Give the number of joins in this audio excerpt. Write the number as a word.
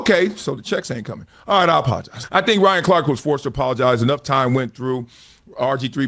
one